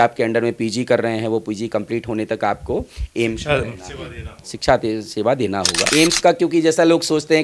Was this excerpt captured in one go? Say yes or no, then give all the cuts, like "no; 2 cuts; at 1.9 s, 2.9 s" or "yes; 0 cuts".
no; 1 cut; at 5.9 s